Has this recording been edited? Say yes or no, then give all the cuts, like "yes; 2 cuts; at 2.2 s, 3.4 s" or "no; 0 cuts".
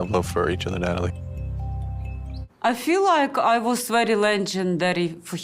yes; 1 cut; at 2.4 s